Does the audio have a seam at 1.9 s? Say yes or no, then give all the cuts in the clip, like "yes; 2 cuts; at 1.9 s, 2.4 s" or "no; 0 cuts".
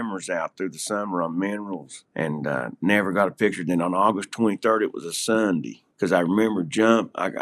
yes; 2 cuts; at 1.9 s, 5.8 s